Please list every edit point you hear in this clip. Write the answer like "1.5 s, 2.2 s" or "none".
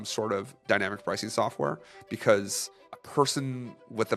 none